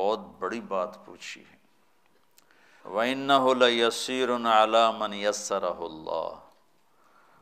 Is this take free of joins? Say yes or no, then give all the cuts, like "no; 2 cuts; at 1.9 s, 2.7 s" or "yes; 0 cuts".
no; 1 cut; at 2.8 s